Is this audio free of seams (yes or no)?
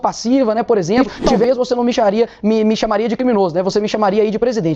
no